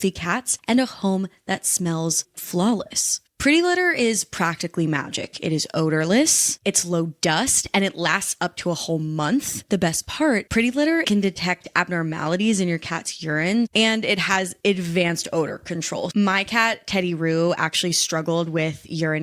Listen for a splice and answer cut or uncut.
cut